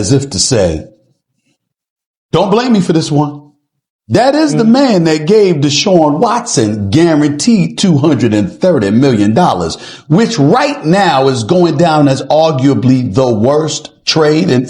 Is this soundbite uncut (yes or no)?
yes